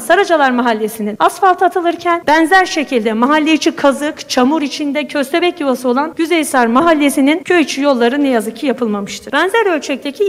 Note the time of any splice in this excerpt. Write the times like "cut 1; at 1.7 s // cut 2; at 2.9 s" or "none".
cut 1; at 1.0 s // cut 2; at 2.2 s // cut 3; at 6.1 s // cut 4; at 7.4 s // cut 5; at 9.2 s

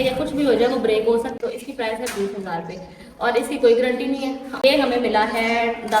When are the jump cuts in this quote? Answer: cut 1; at 1.3 s // cut 2; at 4.6 s

